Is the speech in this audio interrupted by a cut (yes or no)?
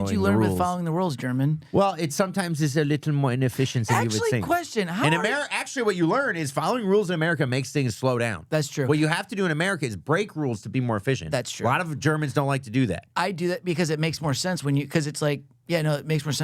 no